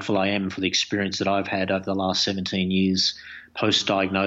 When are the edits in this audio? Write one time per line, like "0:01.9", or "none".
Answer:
none